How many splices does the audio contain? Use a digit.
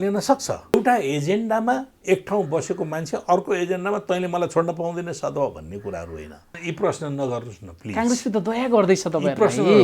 2